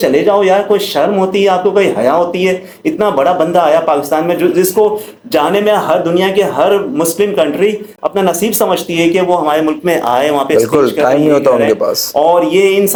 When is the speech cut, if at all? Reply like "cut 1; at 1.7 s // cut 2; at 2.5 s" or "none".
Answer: none